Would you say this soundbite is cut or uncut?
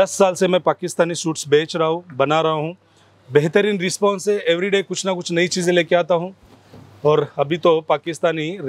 uncut